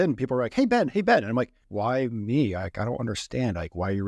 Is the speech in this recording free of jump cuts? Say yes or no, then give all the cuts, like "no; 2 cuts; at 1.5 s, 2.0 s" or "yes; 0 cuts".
no; 1 cut; at 1.6 s